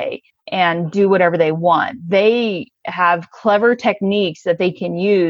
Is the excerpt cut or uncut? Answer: uncut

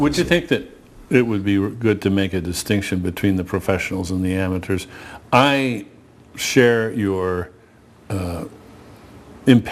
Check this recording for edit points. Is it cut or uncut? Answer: cut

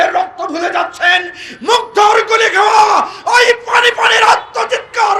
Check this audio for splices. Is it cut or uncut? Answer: uncut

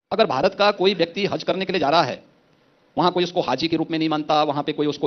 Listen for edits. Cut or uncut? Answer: uncut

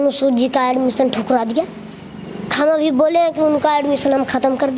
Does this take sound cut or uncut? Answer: uncut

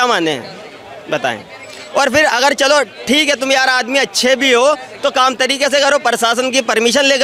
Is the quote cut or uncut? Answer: uncut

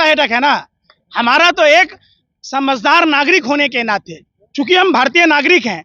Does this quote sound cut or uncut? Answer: uncut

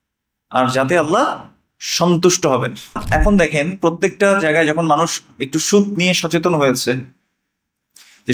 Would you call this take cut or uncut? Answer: cut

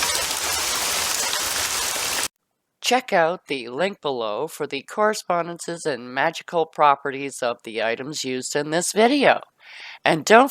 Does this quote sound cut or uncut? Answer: cut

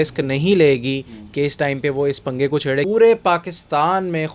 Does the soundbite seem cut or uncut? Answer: cut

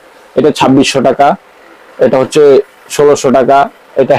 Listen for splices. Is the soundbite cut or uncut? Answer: uncut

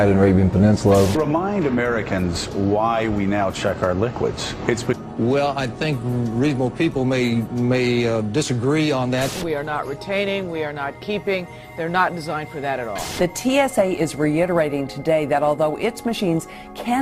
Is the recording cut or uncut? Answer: uncut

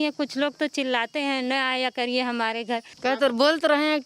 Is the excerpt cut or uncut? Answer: cut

